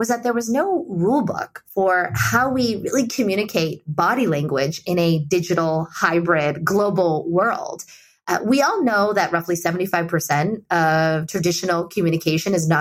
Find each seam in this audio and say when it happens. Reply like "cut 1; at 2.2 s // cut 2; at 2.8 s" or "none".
none